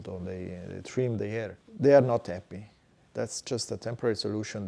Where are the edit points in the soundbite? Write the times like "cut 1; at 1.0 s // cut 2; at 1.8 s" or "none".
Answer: cut 1; at 1.6 s